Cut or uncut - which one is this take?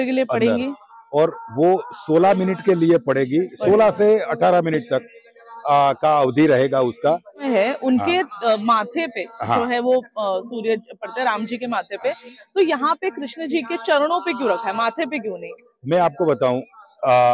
cut